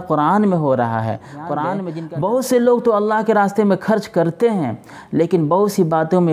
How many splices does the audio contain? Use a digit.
1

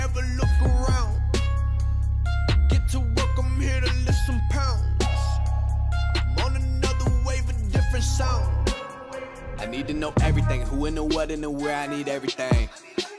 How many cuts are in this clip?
0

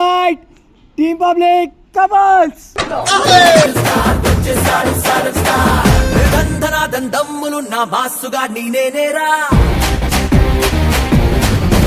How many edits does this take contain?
0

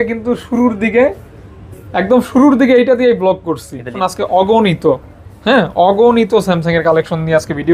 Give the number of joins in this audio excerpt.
1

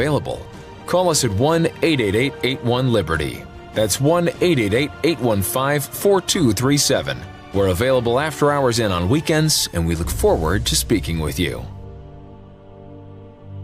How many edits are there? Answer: 1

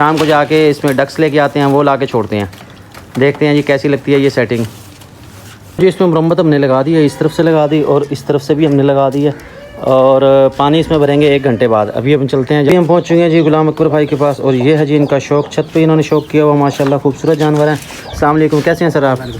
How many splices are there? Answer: 2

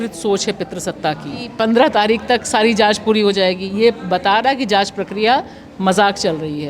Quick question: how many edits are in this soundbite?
1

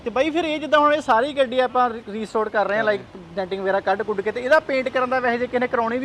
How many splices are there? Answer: 0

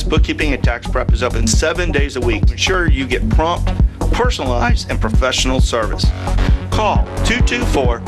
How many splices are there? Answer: 0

